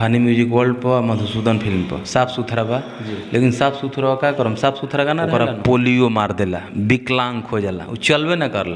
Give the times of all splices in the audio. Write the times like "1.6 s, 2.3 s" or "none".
5.3 s